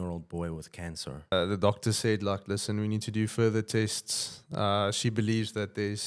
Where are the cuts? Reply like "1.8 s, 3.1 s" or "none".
1.3 s